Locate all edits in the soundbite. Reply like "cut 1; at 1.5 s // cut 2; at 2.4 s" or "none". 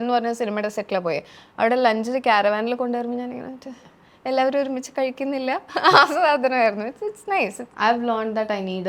cut 1; at 7.6 s

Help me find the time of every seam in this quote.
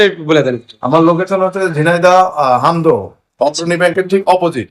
none

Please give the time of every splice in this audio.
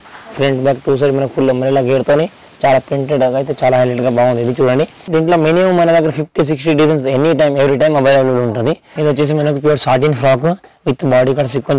cut 1; at 5.0 s // cut 2; at 8.9 s

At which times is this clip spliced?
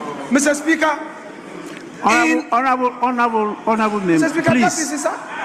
none

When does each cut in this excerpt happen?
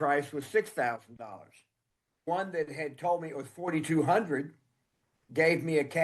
cut 1; at 2.3 s

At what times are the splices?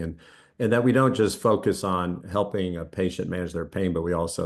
none

